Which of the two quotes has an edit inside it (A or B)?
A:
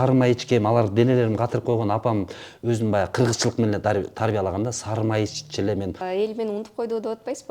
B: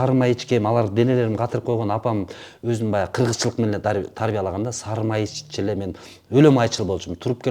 A